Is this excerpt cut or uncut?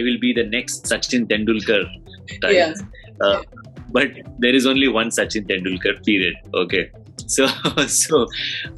uncut